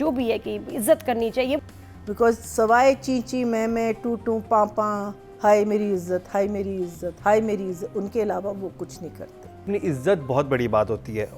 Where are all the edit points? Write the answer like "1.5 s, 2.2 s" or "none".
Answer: 1.6 s, 9.7 s